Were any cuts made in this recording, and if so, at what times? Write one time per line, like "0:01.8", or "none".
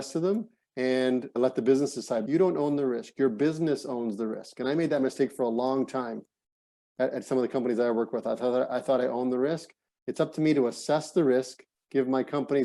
0:02.2